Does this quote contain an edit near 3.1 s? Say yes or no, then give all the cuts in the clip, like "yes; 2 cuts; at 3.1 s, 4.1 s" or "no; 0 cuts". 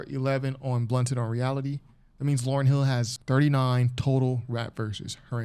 yes; 1 cut; at 3.1 s